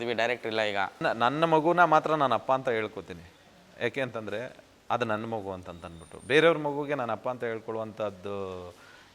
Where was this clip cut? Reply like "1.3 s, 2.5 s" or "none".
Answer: 1.0 s

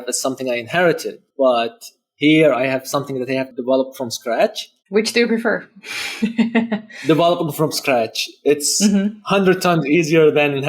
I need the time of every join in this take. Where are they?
1.2 s, 3.5 s

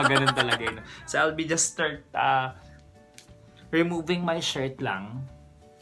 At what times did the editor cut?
1.1 s

